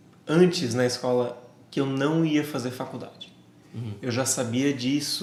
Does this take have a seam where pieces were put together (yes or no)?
no